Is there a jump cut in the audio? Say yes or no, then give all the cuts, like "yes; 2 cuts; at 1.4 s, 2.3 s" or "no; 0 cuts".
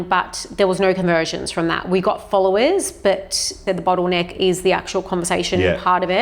yes; 1 cut; at 3.6 s